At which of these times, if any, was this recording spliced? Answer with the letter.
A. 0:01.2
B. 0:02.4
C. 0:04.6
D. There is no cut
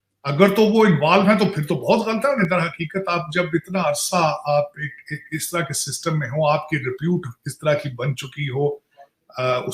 B